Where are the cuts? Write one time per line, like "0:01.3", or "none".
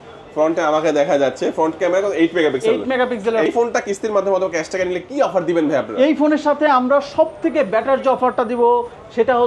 0:03.5